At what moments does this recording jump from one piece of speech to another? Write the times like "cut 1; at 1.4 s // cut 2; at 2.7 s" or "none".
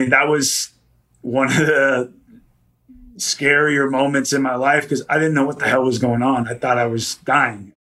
none